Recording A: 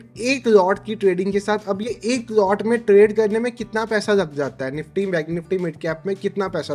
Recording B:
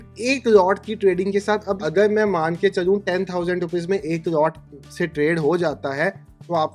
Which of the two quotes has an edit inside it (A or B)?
B